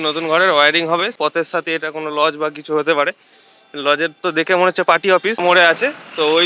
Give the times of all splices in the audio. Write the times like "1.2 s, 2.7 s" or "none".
1.1 s, 5.4 s

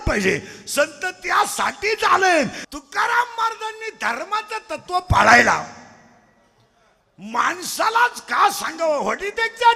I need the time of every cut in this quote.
2.6 s

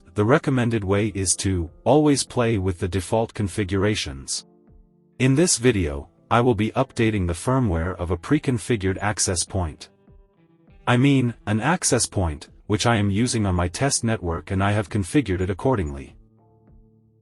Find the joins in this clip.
16.1 s

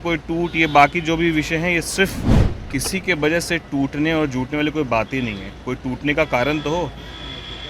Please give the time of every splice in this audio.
2.3 s

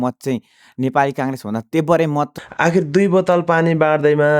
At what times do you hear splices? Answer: 2.3 s

